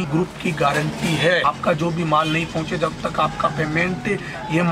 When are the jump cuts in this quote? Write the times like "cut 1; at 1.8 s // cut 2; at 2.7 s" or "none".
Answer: none